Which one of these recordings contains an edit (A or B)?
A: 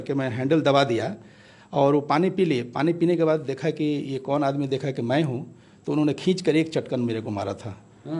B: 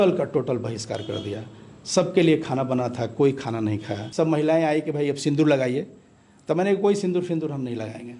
B